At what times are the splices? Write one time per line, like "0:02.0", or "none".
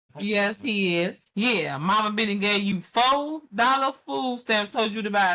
0:01.2